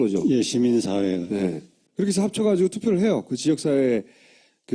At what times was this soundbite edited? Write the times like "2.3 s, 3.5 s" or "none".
3.2 s